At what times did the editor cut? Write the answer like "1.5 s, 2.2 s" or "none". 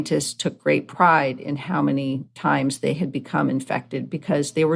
none